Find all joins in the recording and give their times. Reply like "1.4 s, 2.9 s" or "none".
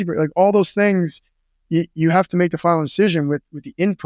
none